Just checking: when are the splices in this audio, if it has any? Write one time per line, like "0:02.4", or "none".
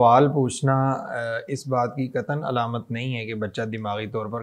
none